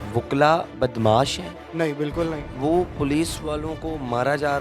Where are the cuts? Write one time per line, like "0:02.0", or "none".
0:01.6
0:02.5